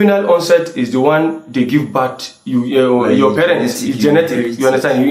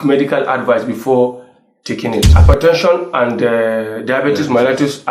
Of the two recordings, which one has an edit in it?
second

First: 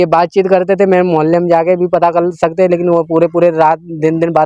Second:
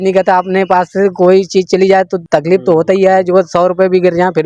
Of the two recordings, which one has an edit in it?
second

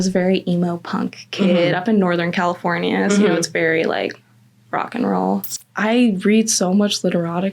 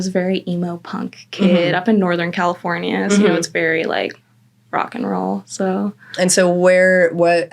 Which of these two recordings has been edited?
first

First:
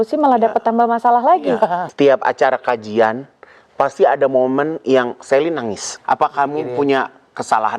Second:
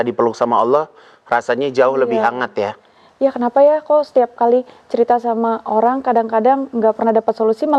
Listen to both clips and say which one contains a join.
first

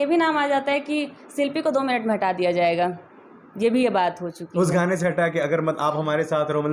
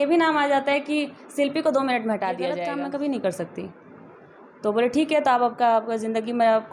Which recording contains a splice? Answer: second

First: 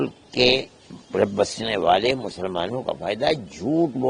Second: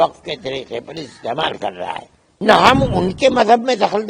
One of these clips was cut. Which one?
second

